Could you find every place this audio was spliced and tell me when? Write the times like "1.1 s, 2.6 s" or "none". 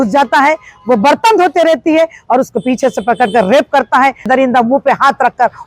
4.3 s